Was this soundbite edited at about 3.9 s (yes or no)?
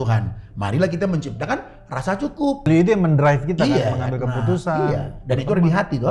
no